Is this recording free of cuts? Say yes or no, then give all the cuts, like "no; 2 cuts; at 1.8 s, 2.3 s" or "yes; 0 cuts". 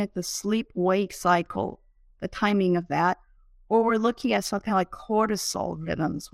yes; 0 cuts